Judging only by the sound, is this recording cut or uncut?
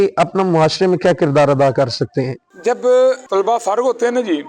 uncut